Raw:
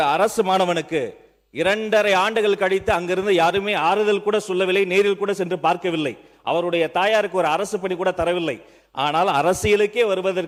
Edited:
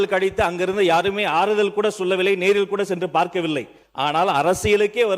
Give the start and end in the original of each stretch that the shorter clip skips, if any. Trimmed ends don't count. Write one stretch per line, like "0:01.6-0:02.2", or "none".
0:06.3-0:08.8